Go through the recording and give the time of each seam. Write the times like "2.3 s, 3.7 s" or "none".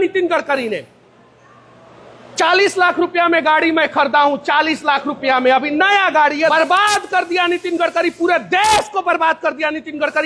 none